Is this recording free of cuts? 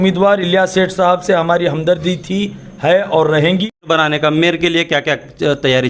no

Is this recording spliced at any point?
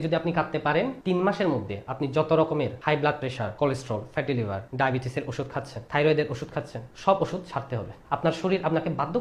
yes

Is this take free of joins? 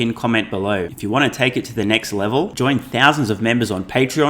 no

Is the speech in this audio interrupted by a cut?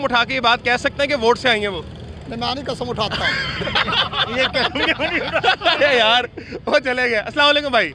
no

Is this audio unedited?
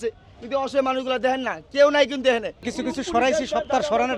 no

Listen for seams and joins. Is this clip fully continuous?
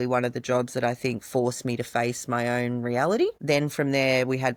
yes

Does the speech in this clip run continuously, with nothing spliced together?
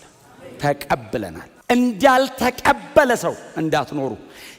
no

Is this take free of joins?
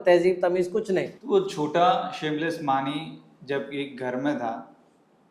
no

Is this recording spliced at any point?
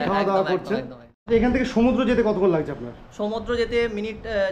no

